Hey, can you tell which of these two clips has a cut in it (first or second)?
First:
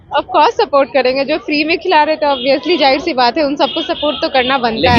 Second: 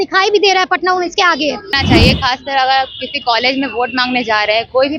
second